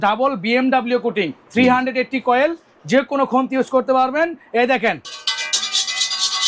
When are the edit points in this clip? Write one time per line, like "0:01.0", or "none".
none